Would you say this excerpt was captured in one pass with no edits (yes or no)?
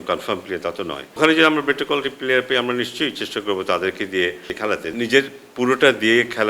no